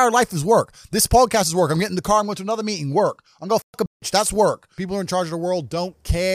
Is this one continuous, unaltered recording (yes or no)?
no